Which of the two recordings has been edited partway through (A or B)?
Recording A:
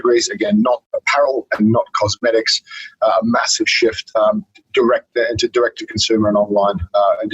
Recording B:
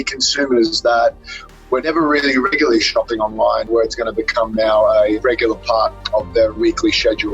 B